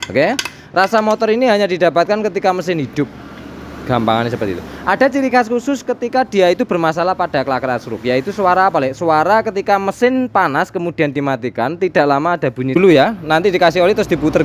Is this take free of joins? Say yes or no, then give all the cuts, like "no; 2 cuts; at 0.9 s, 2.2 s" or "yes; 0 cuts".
no; 1 cut; at 12.7 s